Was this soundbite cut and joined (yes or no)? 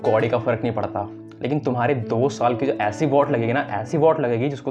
no